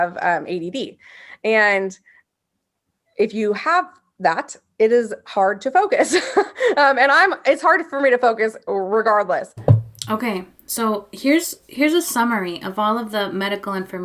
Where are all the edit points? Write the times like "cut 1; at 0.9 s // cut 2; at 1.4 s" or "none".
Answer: none